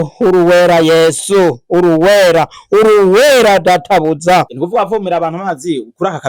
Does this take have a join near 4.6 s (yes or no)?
yes